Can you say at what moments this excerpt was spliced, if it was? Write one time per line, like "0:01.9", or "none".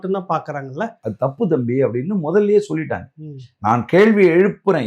0:01.0

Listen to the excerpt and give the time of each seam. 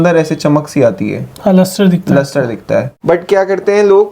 0:02.9

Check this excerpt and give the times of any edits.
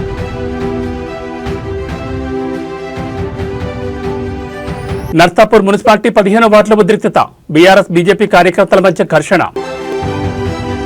0:01.7
0:05.1
0:09.7

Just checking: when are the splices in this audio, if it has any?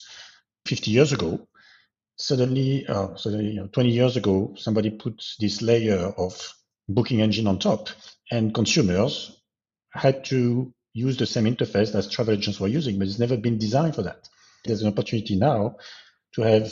0:14.7

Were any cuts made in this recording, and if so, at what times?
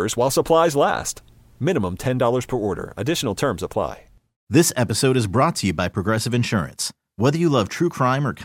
0:04.3

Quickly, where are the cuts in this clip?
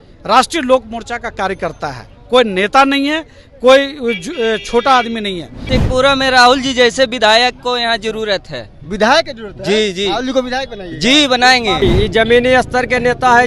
0:05.6
0:11.8

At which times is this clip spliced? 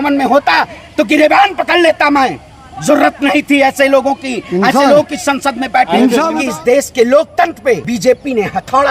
0:06.3
0:07.8

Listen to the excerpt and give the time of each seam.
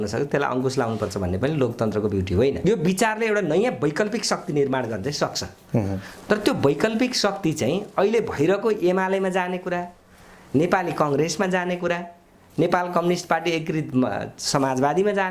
0:02.6

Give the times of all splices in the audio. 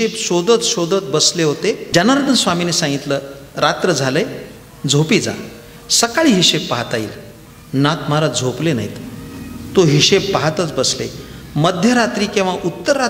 0:01.8

